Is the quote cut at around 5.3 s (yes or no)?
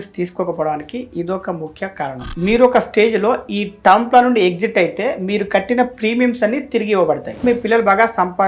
no